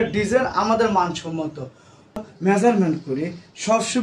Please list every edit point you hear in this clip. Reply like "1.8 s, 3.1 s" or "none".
2.3 s